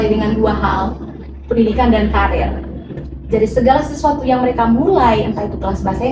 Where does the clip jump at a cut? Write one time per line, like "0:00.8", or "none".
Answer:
none

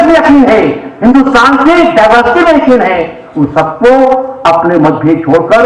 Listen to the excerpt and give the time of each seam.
none

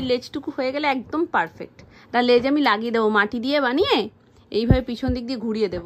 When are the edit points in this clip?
none

